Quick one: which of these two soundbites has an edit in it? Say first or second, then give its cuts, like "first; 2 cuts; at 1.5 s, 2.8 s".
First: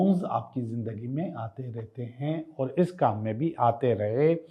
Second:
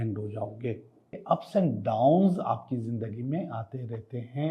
second; 1 cut; at 1.1 s